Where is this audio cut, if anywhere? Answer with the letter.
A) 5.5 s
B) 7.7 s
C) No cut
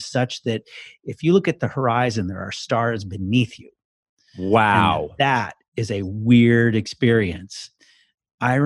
B